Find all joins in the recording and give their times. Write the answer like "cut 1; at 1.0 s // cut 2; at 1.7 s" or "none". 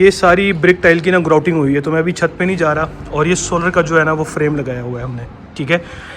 none